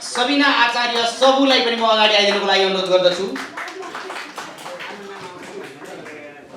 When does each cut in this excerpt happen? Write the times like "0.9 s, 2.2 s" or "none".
none